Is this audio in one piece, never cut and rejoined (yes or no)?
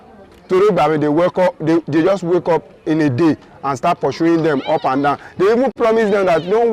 no